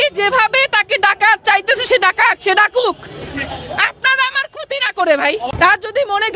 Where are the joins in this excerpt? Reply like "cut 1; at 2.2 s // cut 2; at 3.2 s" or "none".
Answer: cut 1; at 5.5 s